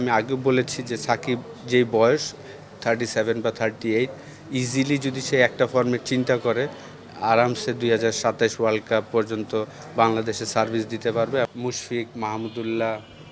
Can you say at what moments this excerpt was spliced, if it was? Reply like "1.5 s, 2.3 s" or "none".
11.5 s